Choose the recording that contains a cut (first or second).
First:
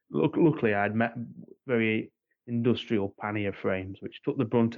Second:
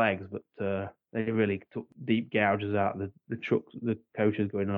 second